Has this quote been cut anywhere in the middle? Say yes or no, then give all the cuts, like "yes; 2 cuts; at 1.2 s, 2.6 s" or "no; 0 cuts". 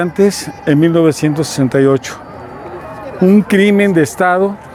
no; 0 cuts